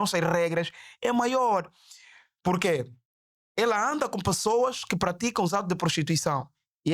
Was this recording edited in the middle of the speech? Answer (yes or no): no